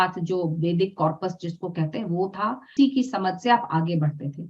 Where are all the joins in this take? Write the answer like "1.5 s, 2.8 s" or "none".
2.7 s